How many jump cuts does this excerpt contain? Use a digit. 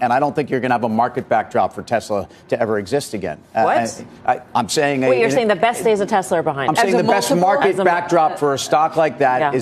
1